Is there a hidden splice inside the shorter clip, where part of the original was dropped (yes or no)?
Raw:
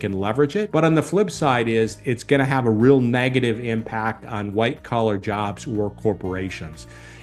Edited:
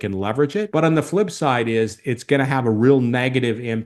no